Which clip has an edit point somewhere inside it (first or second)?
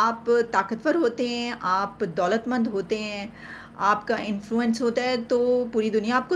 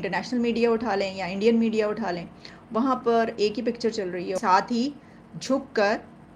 second